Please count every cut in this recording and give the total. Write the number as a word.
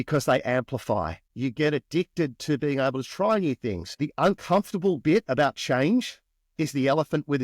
two